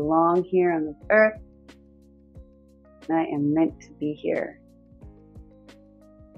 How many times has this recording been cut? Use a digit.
1